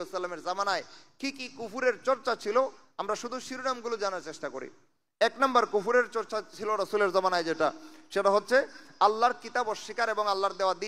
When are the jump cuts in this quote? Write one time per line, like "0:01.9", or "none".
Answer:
none